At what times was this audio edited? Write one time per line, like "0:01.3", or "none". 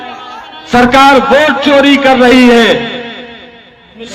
none